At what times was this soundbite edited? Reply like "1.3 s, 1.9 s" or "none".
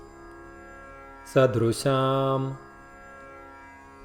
1.2 s, 2.6 s